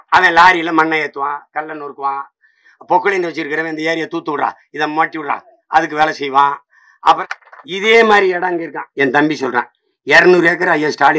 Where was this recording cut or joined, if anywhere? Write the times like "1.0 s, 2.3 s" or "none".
7.2 s